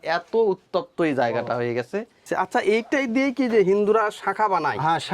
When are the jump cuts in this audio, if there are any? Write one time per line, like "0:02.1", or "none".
0:02.2